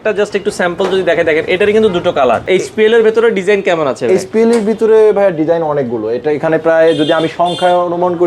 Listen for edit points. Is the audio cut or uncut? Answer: cut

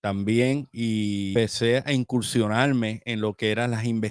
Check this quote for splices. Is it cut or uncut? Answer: cut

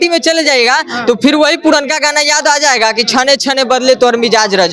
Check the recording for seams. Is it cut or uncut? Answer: uncut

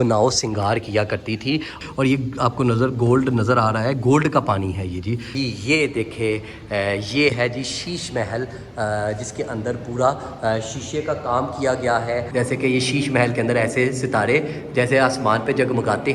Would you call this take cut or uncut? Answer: cut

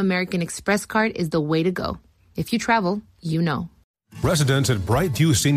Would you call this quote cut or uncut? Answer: cut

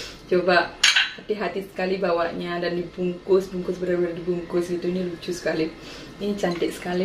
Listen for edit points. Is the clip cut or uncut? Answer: uncut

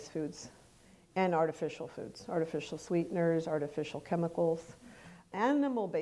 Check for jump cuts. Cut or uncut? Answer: uncut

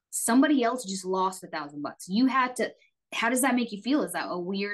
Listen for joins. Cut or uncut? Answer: uncut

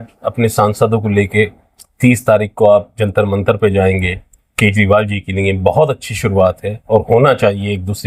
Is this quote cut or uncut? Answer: uncut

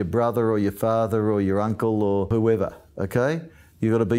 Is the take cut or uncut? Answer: cut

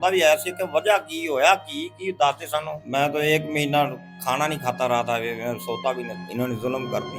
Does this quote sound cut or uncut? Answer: cut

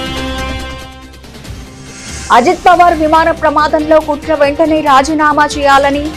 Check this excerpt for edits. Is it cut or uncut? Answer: cut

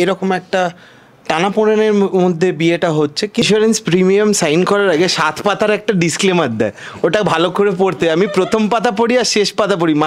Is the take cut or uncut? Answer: cut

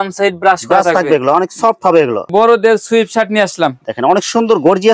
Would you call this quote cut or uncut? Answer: cut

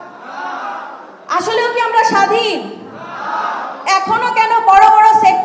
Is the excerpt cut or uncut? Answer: cut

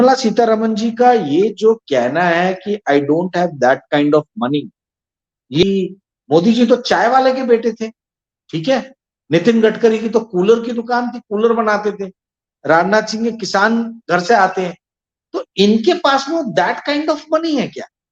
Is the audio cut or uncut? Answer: cut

